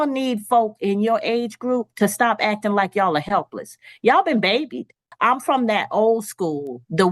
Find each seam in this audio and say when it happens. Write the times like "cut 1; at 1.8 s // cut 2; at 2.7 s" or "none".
cut 1; at 5.0 s

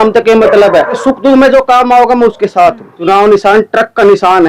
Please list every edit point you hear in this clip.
cut 1; at 1.0 s // cut 2; at 2.9 s

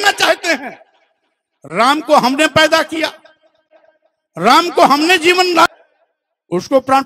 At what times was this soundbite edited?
cut 1; at 5.7 s

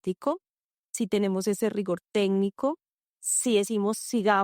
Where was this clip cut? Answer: cut 1; at 3.4 s

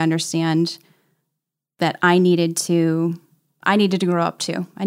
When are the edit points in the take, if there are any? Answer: none

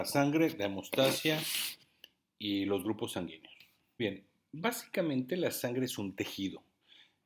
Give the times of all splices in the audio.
cut 1; at 4.0 s

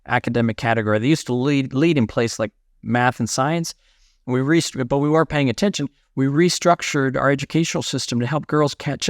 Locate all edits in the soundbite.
none

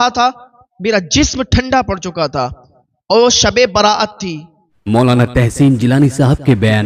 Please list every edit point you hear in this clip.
cut 1; at 4.8 s

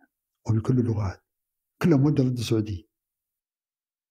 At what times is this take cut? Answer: none

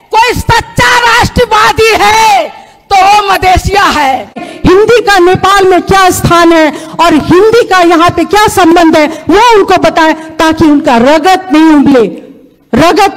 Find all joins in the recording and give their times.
cut 1; at 4.5 s

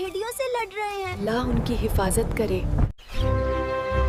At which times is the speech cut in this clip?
none

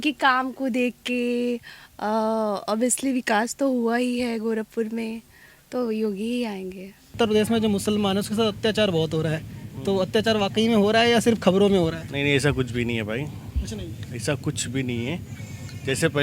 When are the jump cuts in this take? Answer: cut 1; at 7.1 s

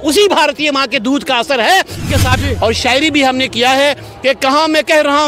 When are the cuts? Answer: cut 1; at 2.4 s

